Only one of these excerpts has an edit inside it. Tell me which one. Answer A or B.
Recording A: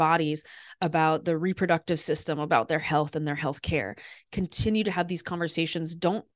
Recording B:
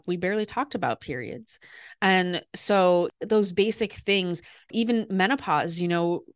B